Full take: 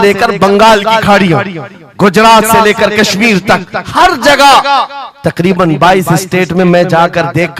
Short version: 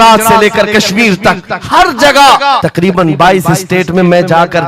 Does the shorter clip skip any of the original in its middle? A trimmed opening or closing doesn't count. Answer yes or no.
yes